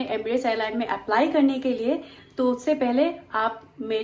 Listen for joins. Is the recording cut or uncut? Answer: uncut